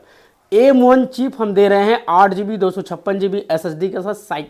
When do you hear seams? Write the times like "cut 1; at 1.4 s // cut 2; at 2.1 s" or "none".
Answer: none